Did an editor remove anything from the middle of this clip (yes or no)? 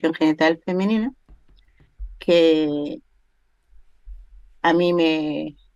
no